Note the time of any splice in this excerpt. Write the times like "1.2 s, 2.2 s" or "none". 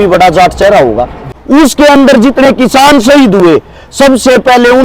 1.2 s